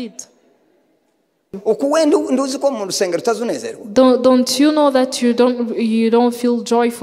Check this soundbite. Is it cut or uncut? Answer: cut